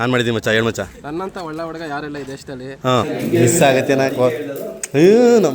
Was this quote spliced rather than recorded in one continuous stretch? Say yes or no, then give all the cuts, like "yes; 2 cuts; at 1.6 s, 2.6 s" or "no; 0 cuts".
yes; 1 cut; at 3.0 s